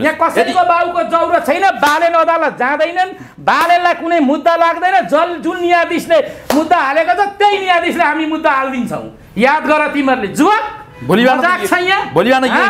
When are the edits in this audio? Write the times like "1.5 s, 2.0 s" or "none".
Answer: none